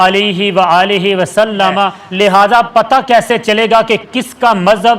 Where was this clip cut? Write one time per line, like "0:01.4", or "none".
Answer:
0:02.0